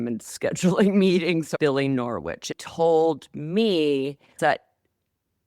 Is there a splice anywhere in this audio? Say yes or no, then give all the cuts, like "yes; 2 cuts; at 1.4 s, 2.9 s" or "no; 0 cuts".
yes; 3 cuts; at 1.5 s, 2.5 s, 4.4 s